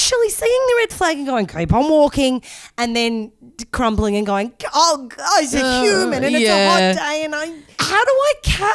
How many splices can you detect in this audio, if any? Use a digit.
1